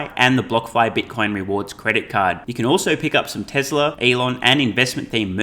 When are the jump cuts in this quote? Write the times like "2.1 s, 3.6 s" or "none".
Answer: 4.0 s

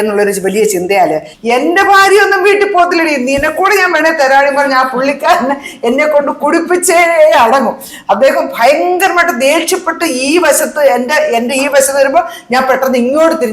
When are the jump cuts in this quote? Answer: 1.3 s

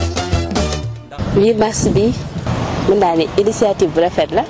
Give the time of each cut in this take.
1.2 s

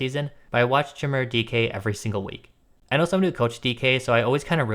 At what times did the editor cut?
2.7 s

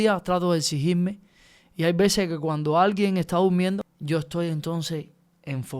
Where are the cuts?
3.8 s

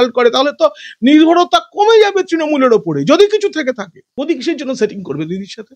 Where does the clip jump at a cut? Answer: 4.1 s

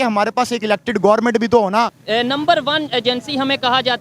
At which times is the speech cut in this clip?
2.0 s

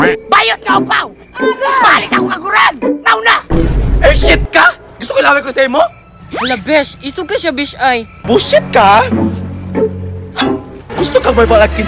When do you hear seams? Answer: 8.2 s

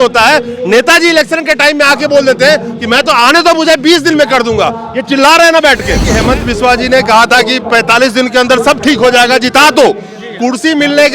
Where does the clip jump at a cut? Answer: 6.1 s

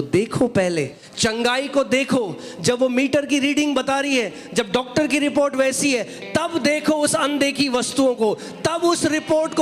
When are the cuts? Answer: 1.0 s

